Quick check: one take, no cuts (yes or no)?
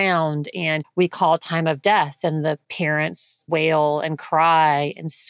no